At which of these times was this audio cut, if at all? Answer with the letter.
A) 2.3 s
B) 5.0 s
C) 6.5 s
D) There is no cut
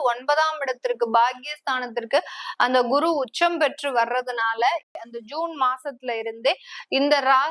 B